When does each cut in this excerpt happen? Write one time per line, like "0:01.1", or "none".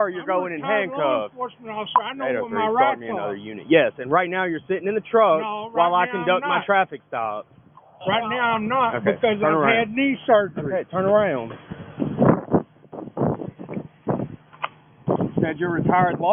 none